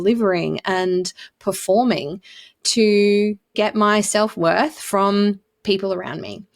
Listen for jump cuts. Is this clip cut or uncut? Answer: cut